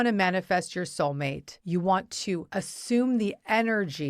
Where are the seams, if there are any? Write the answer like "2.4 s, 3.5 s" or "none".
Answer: 1.5 s, 2.5 s